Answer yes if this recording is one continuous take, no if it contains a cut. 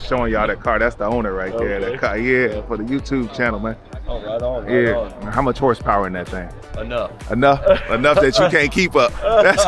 yes